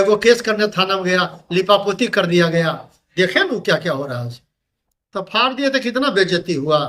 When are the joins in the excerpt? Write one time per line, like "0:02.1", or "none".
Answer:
0:04.7